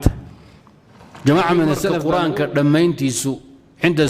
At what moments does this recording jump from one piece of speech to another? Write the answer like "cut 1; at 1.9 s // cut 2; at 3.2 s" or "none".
cut 1; at 2.0 s

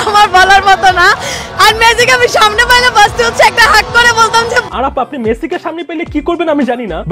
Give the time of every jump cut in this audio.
cut 1; at 4.7 s

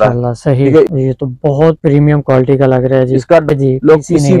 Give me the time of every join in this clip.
cut 1; at 0.9 s // cut 2; at 3.5 s

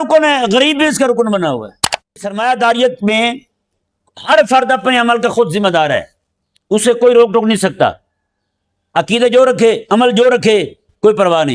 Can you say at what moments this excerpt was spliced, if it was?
cut 1; at 2.3 s

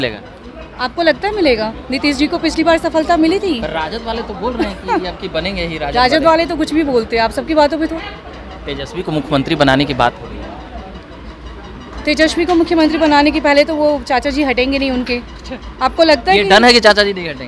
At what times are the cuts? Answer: cut 1; at 7.9 s

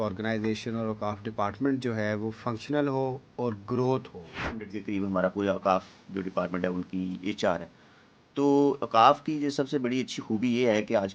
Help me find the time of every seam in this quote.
cut 1; at 4.7 s

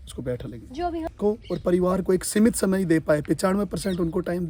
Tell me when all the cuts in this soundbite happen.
cut 1; at 1.1 s

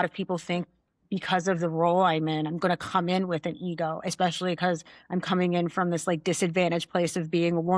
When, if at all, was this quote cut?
none

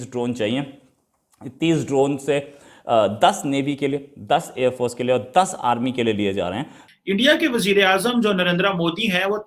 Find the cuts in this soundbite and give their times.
cut 1; at 6.9 s

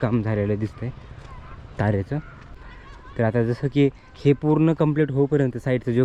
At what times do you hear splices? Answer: none

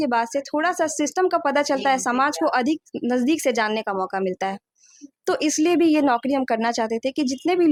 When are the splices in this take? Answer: none

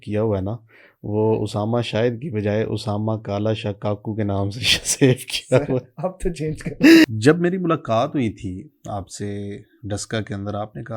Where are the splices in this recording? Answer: cut 1; at 7.0 s

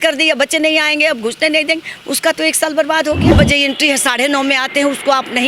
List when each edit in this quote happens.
cut 1; at 3.3 s

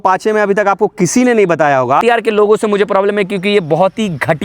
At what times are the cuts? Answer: cut 1; at 2.0 s

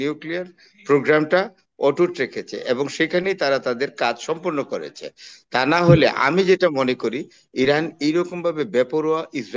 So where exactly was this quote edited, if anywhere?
none

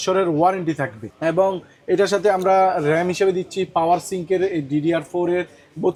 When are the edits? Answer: none

